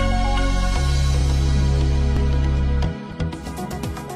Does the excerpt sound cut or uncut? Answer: uncut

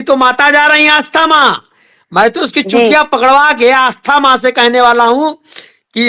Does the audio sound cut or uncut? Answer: uncut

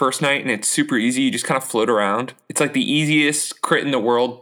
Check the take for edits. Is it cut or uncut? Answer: cut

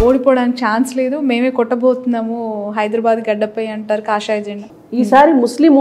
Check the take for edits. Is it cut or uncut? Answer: cut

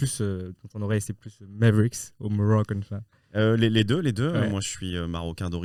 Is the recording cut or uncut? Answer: uncut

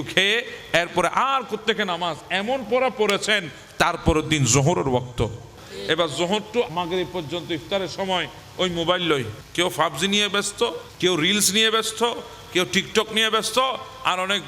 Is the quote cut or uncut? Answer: cut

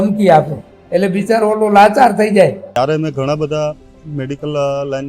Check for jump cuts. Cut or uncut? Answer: cut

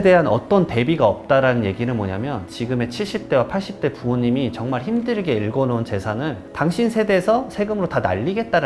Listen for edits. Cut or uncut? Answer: cut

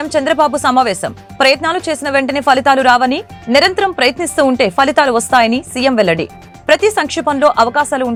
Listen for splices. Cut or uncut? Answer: uncut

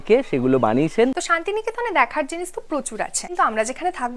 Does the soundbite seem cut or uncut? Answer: cut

